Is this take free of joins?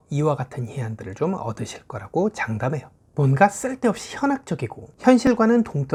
yes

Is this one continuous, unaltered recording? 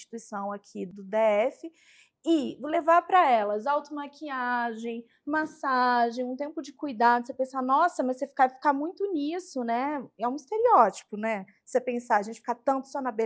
no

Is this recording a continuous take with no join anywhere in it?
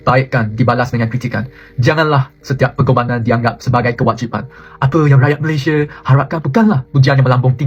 yes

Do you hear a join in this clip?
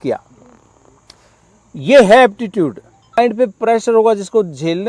yes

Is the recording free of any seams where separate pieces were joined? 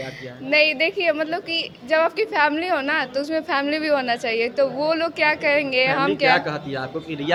yes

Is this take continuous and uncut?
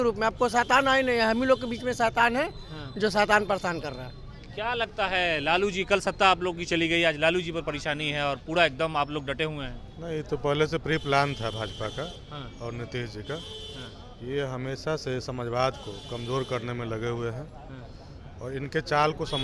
yes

